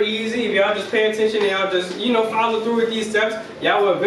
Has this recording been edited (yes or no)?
no